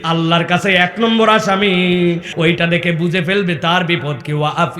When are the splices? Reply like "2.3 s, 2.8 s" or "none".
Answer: 2.3 s